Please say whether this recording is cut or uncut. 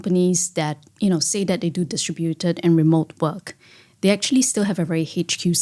uncut